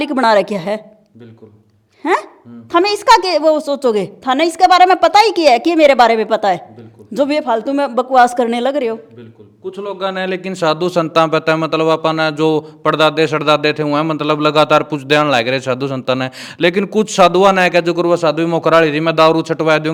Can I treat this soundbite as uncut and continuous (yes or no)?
yes